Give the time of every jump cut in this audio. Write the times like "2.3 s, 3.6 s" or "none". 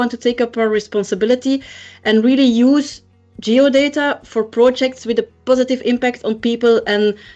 none